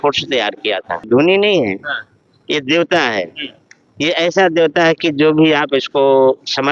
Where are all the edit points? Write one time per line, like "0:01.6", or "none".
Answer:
0:01.1